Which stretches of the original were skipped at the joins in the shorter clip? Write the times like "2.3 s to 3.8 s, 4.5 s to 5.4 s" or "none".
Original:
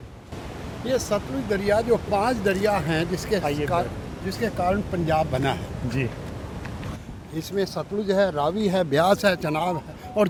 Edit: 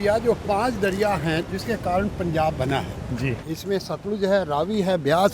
3.1 s to 4.2 s, 6.1 s to 7.3 s